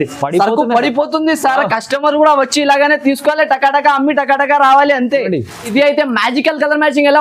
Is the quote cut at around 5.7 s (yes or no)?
yes